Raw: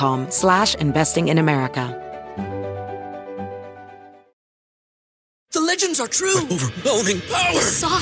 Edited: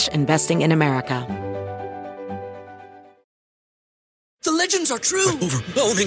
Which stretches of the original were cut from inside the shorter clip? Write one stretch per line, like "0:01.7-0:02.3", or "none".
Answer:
0:01.9-0:02.3